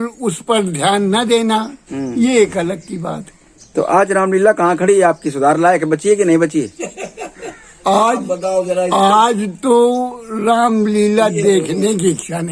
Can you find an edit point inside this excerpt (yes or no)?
no